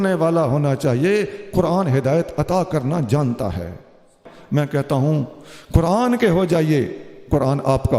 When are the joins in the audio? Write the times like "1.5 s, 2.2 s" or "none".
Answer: 4.3 s